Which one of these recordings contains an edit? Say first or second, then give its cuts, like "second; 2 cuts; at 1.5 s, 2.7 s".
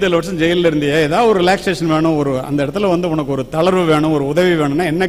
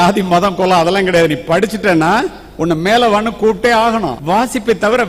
second; 1 cut; at 4.1 s